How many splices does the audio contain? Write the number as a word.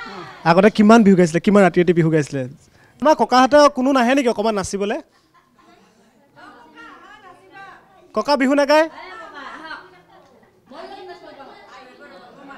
one